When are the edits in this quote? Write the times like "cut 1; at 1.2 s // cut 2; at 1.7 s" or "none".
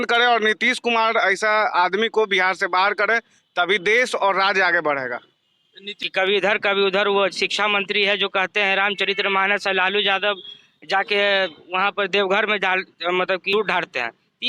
cut 1; at 6.1 s // cut 2; at 13.5 s